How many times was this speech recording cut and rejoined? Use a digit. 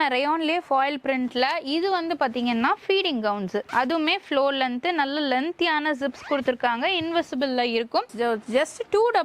1